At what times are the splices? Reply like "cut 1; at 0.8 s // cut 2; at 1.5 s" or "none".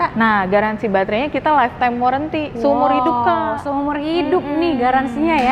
none